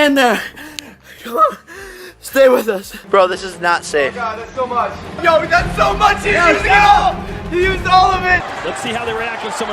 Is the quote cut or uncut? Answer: cut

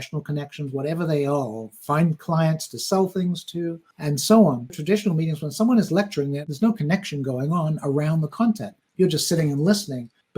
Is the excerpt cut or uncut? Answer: cut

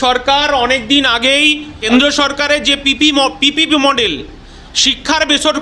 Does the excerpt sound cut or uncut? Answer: cut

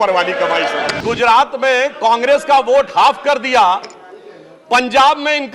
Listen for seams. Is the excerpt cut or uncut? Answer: cut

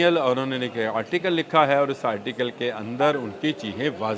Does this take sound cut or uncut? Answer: uncut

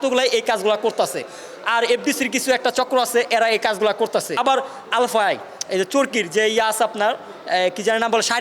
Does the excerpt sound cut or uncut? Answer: cut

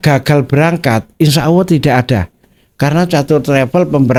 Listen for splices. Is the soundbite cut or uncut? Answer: uncut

